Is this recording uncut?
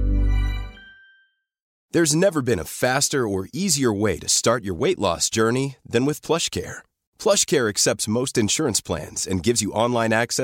no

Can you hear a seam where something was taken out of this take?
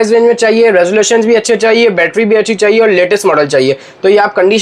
no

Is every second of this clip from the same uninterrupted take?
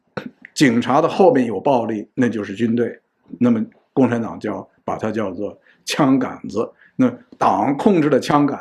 yes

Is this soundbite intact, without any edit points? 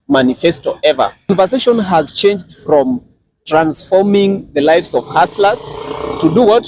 no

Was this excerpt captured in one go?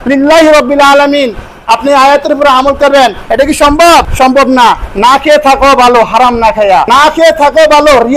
no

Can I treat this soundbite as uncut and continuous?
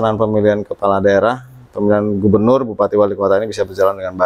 yes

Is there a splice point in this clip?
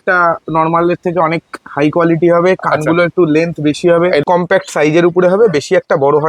yes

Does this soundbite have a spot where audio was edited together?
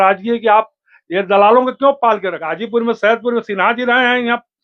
yes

